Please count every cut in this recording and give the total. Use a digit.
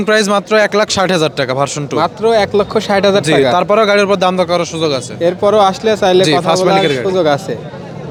0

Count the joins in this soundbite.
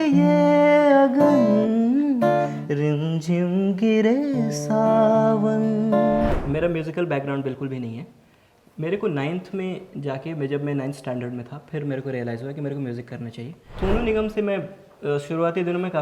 2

